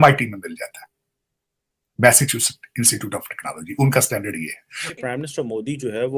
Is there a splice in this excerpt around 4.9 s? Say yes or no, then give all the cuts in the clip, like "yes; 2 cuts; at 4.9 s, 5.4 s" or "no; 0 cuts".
yes; 1 cut; at 4.9 s